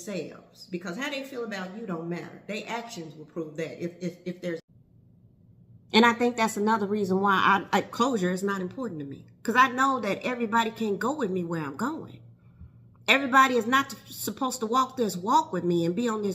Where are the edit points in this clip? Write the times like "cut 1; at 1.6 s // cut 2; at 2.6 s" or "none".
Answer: cut 1; at 4.6 s